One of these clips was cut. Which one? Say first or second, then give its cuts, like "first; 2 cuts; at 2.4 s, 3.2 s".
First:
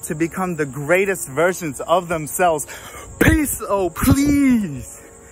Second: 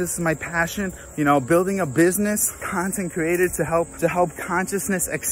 second; 3 cuts; at 1.0 s, 2.7 s, 3.9 s